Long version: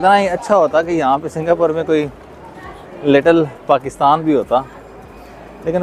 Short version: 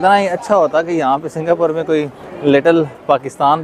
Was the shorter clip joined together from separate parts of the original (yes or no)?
yes